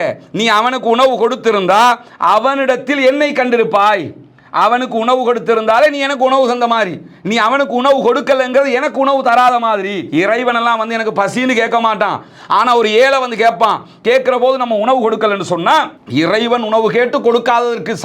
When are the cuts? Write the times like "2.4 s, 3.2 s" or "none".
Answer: none